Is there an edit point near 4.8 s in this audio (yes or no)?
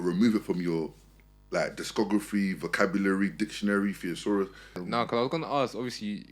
yes